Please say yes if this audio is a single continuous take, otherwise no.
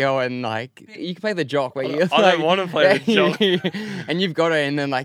no